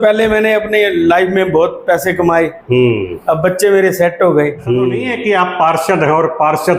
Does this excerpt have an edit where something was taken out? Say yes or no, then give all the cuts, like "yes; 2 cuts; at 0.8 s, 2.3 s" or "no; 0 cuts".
yes; 1 cut; at 5.1 s